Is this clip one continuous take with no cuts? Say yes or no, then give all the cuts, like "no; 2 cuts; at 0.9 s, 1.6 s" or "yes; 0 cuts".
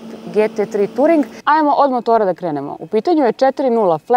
no; 1 cut; at 1.4 s